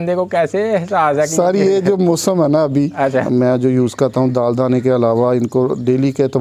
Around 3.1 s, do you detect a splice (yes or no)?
yes